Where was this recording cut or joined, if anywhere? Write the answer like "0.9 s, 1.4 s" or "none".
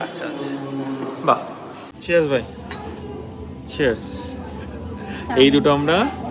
1.9 s